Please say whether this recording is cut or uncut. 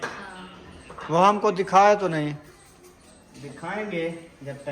uncut